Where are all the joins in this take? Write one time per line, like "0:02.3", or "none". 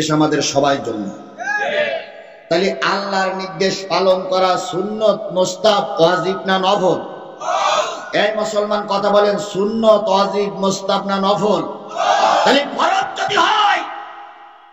0:04.0